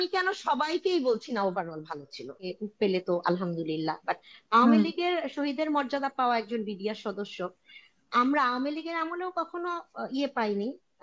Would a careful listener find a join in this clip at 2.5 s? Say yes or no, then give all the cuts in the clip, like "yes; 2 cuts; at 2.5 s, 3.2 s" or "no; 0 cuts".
yes; 1 cut; at 2.5 s